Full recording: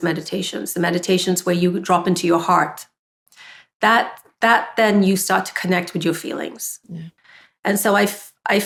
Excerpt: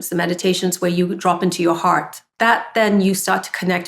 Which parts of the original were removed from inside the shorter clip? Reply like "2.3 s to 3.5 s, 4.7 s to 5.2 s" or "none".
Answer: 2.8 s to 4.2 s